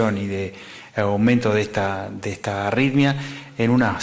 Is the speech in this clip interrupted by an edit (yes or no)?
yes